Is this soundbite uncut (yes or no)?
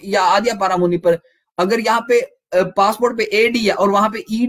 yes